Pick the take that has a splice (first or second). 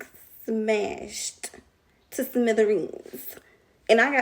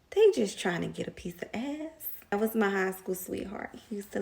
second